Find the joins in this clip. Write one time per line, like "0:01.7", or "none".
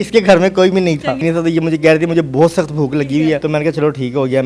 0:01.2
0:03.4